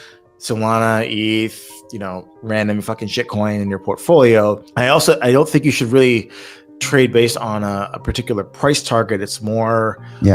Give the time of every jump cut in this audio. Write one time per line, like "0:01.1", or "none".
0:04.7